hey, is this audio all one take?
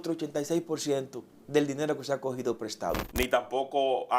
no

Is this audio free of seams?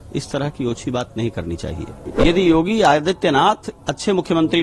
no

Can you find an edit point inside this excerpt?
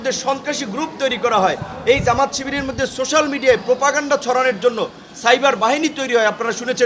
no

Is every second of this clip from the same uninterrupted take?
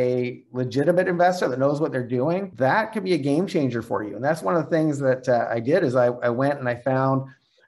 no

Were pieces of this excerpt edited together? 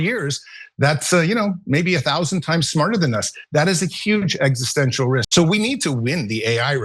yes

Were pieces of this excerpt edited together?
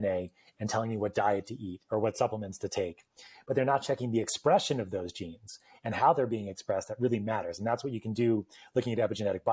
no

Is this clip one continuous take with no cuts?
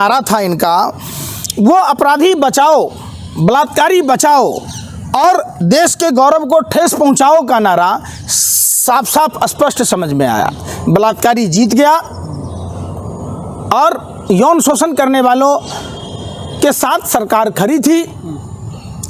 yes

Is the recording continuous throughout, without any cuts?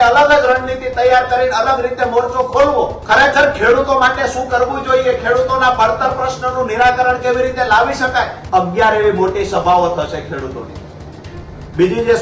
no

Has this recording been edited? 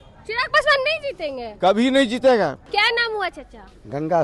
no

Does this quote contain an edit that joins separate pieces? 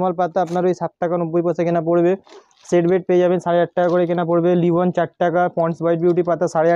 no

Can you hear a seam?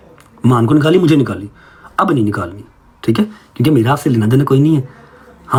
no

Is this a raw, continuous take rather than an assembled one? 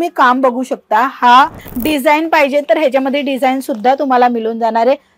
no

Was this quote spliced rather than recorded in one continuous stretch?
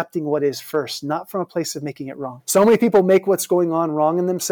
yes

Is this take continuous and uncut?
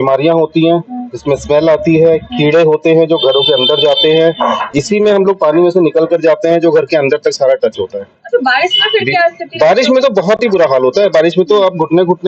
yes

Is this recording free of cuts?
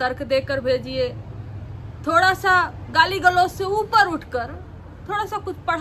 yes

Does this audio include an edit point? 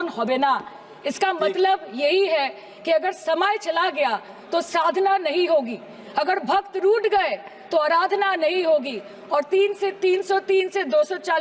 no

